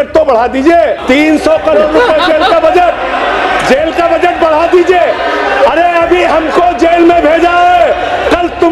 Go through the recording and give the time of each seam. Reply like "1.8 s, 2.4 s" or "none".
1.0 s